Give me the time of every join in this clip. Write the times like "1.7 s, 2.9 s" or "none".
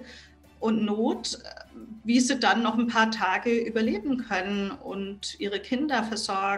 none

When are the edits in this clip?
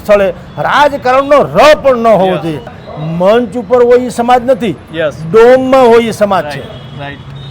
2.8 s

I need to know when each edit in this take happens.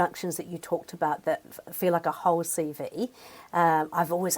none

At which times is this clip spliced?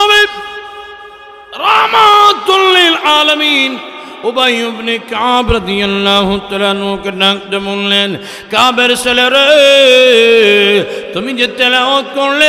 none

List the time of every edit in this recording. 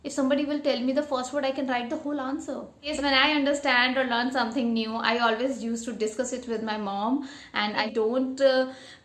2.9 s, 7.9 s

